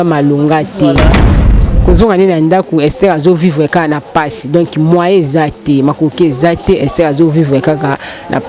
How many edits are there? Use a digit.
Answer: 1